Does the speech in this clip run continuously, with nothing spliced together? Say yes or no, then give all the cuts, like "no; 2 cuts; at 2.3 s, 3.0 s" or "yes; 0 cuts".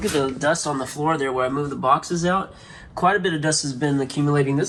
yes; 0 cuts